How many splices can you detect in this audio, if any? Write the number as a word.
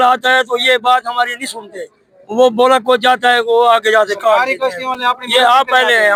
zero